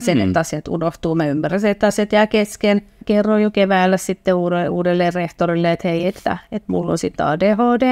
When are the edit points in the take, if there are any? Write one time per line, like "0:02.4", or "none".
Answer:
0:03.0